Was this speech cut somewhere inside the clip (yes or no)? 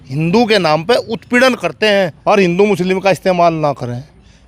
yes